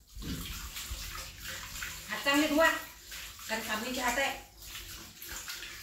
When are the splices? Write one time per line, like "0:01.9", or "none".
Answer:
none